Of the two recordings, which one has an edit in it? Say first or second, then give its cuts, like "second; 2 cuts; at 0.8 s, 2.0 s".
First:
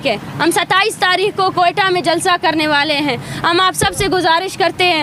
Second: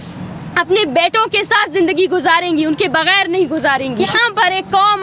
second; 1 cut; at 4.1 s